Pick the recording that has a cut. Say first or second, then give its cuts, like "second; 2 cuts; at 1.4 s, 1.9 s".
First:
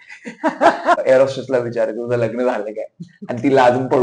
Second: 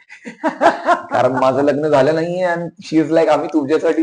first; 1 cut; at 1.0 s